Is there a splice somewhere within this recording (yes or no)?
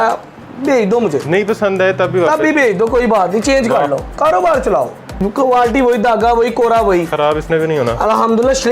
yes